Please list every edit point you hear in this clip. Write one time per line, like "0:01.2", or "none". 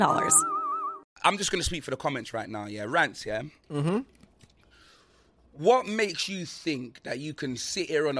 0:01.1